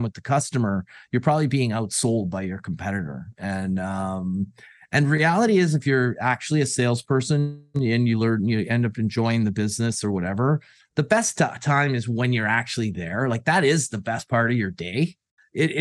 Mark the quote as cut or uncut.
uncut